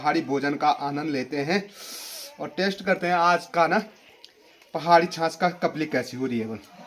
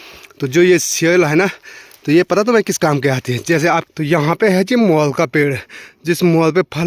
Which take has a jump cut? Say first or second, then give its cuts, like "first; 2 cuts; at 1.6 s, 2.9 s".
second; 1 cut; at 3.9 s